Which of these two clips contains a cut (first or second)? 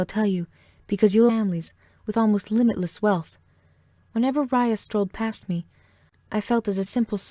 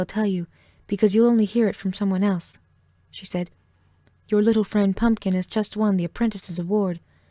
second